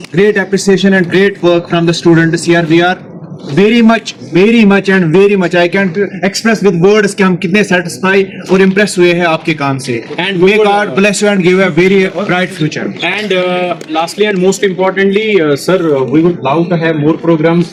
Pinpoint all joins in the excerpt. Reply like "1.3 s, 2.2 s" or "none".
none